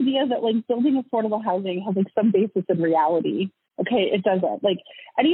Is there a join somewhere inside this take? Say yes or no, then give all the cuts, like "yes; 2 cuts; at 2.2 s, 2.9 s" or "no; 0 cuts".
no; 0 cuts